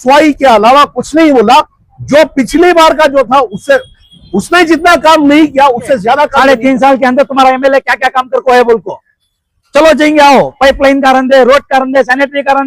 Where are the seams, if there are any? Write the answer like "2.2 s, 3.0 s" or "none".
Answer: 6.3 s

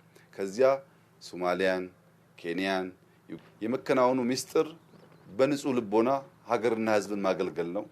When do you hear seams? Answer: 3.2 s

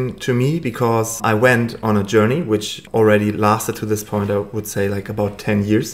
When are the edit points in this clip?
1.2 s, 2.8 s

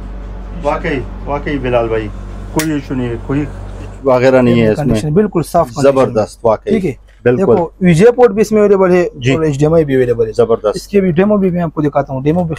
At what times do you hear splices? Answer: 4.0 s

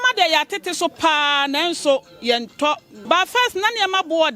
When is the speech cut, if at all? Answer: 2.9 s

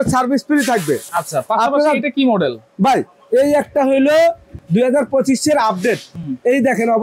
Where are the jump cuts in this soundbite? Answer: none

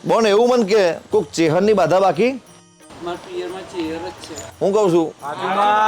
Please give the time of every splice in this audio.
1.0 s

